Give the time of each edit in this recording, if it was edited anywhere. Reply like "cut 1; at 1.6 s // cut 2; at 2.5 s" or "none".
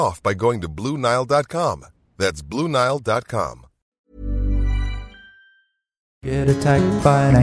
cut 1; at 3.8 s // cut 2; at 6.3 s